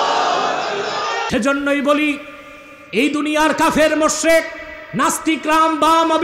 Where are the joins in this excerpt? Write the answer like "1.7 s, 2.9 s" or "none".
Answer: 1.2 s